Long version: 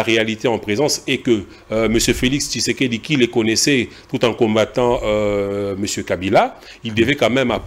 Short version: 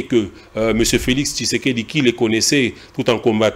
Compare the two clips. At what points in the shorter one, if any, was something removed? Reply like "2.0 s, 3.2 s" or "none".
none